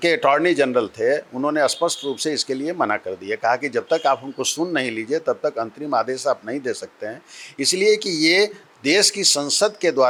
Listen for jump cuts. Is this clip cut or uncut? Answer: uncut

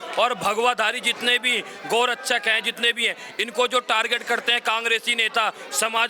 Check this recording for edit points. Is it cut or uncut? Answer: uncut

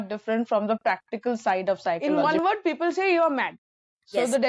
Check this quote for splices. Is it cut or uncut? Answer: cut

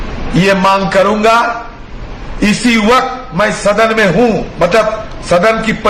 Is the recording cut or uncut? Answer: uncut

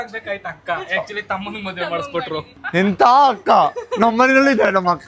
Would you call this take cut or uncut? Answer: uncut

